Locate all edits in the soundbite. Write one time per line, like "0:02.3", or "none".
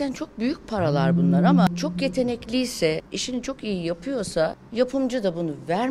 0:01.7
0:03.1
0:04.6